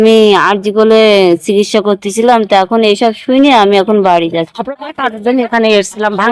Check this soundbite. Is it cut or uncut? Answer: cut